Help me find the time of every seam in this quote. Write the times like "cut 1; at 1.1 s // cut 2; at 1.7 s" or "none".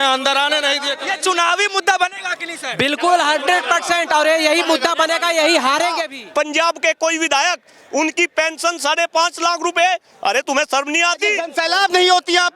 cut 1; at 0.9 s // cut 2; at 6.1 s // cut 3; at 11.5 s